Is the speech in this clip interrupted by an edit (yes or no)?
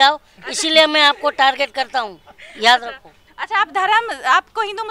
no